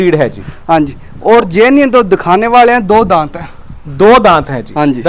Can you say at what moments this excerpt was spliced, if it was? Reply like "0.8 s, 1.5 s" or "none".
none